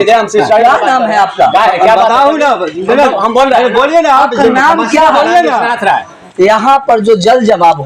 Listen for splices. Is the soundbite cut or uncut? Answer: uncut